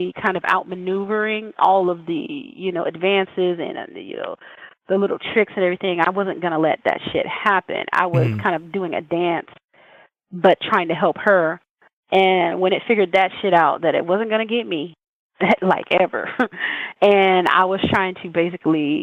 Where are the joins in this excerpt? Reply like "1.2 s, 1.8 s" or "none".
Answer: none